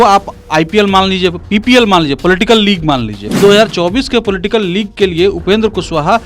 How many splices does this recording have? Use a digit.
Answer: 1